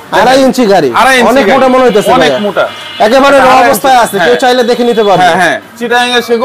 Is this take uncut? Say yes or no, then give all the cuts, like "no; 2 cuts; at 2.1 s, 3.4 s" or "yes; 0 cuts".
yes; 0 cuts